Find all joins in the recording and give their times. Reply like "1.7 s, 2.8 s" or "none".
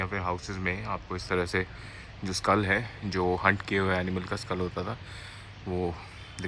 none